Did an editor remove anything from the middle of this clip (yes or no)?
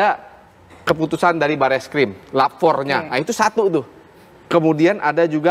no